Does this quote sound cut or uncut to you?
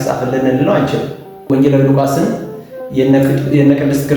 cut